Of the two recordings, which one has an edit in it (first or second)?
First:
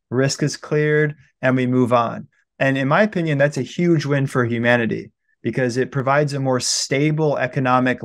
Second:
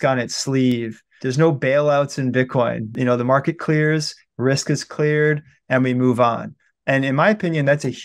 second